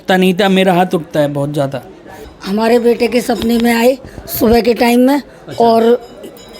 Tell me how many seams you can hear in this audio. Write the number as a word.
one